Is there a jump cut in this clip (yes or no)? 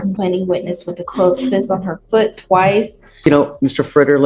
yes